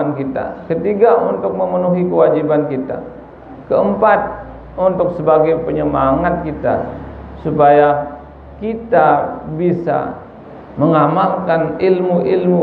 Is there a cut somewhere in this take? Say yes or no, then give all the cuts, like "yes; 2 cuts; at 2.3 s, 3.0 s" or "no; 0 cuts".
no; 0 cuts